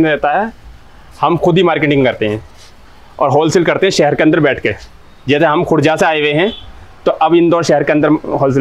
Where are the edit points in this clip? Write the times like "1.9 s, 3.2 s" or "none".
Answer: none